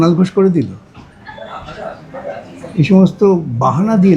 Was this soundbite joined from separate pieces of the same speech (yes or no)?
no